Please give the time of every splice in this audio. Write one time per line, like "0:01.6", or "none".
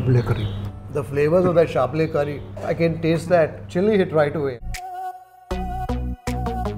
0:05.0